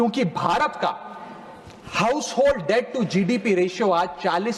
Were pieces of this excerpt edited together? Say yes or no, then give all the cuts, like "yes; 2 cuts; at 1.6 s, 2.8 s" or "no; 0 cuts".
no; 0 cuts